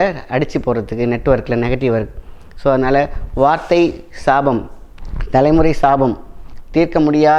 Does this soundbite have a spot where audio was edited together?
no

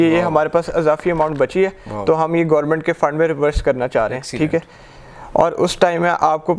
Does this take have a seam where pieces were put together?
no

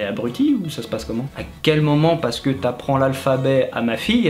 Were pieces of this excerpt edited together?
no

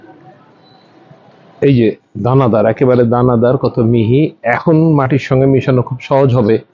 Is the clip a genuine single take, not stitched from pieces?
yes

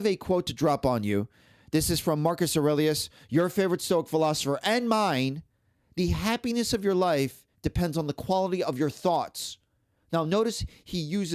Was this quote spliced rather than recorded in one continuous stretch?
no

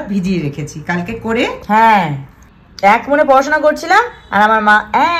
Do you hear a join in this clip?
no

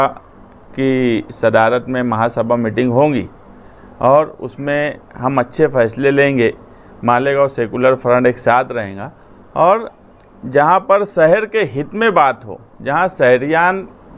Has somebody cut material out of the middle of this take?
no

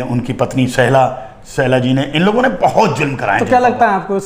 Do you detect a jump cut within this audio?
no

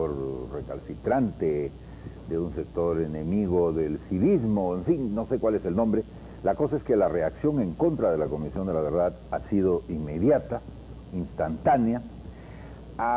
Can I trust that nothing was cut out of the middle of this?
no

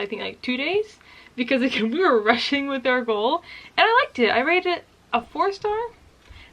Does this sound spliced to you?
no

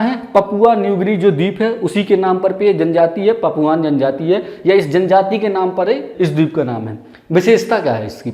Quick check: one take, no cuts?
no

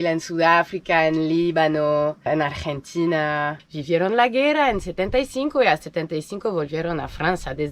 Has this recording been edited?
yes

